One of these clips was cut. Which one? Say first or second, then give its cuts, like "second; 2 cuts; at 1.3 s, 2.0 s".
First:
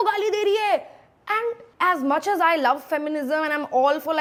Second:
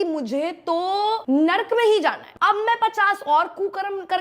second; 2 cuts; at 1.2 s, 2.3 s